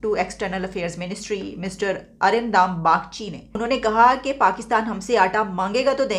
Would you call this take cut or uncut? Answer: cut